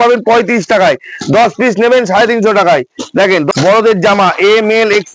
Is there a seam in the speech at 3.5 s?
yes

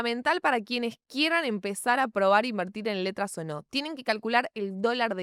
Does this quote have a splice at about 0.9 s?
no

